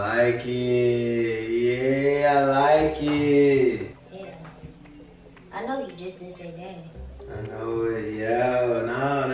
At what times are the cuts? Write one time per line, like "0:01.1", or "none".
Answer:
none